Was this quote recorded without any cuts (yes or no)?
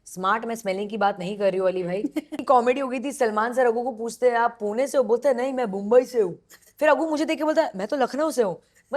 no